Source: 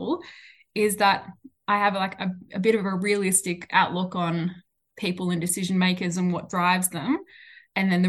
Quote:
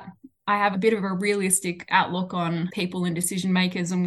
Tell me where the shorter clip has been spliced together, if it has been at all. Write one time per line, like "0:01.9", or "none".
0:00.7
0:02.7